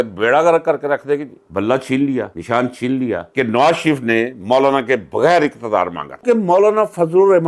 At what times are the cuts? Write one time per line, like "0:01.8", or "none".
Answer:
0:01.3
0:03.3
0:06.2